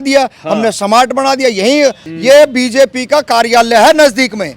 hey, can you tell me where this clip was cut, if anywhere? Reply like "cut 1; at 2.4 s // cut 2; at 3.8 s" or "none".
cut 1; at 2.0 s